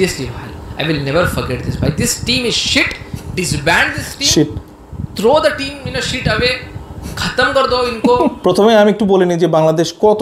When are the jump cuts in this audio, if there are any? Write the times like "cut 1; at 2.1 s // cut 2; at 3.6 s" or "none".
cut 1; at 8.4 s

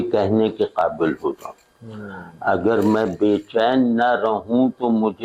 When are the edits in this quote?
none

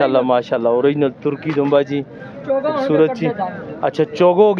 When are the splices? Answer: none

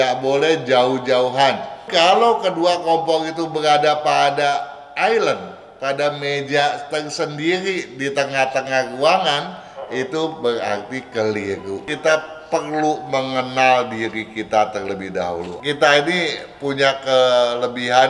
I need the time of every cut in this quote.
cut 1; at 1.8 s // cut 2; at 11.8 s // cut 3; at 15.5 s

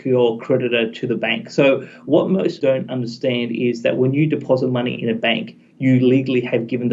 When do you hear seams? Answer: cut 1; at 2.6 s

